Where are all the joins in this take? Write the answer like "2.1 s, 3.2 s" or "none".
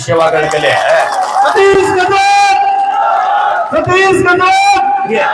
none